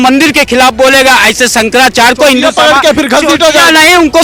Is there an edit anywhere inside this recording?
no; 0 cuts

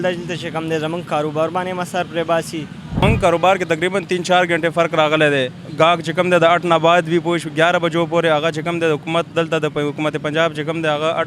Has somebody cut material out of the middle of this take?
yes; 1 cut; at 3.0 s

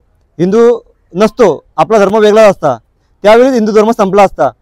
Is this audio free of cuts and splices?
yes; 0 cuts

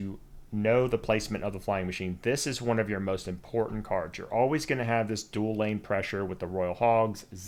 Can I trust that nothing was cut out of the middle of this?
yes; 0 cuts

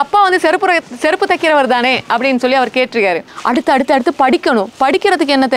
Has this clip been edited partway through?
yes; 1 cut; at 3.3 s

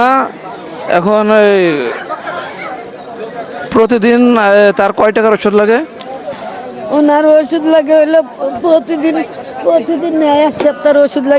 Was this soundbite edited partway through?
no; 0 cuts

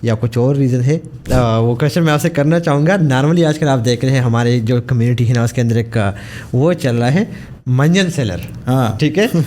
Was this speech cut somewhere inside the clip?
yes; 1 cut; at 1.2 s

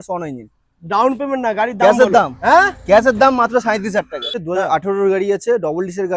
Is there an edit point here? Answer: yes; 1 cut; at 4.4 s

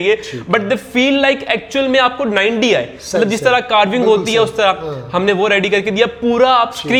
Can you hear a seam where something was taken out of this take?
no; 0 cuts

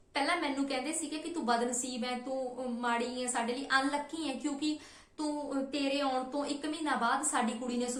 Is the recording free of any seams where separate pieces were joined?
yes; 0 cuts

